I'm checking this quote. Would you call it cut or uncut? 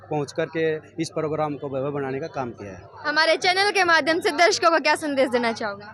uncut